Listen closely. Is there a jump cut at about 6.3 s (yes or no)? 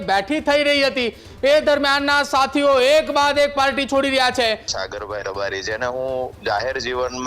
no